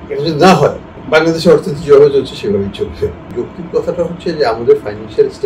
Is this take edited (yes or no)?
yes